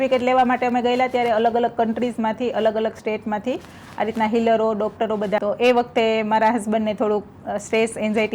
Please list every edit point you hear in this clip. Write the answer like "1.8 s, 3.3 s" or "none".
5.4 s